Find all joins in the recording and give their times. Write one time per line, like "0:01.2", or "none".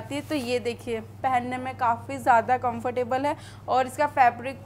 0:01.1